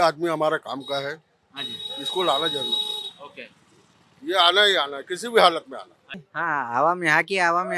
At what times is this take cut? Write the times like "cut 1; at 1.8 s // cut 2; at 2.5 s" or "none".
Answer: cut 1; at 6.3 s